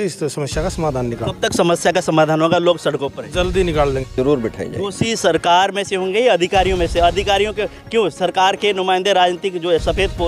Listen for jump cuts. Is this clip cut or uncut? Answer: cut